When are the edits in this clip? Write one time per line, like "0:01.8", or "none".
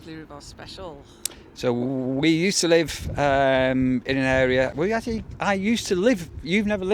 none